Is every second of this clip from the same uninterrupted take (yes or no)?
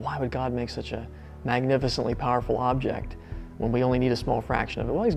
yes